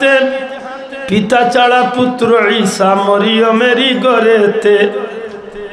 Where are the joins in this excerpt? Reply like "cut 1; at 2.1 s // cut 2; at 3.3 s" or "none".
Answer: none